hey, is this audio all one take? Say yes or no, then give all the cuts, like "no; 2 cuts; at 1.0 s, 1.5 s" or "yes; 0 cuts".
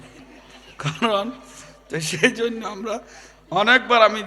yes; 0 cuts